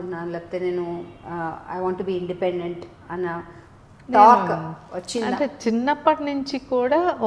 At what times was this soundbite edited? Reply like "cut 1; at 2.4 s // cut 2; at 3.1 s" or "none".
none